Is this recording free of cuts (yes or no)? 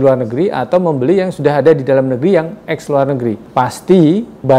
no